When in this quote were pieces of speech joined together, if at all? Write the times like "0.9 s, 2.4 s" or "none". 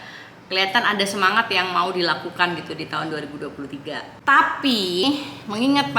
5.0 s